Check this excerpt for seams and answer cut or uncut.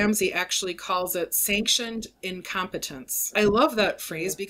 cut